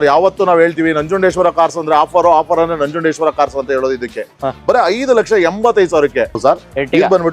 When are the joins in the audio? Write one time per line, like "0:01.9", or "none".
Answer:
0:06.4